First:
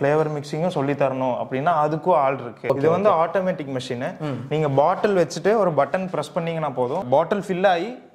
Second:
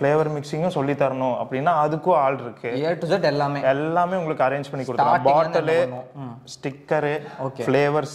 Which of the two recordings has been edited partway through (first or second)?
first